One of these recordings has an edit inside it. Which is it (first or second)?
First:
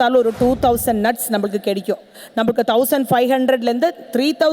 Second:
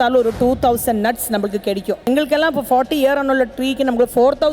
second